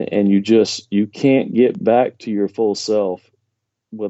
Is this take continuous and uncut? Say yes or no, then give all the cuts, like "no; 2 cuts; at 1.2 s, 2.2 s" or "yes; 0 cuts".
yes; 0 cuts